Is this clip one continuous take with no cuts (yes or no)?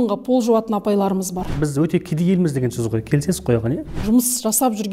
no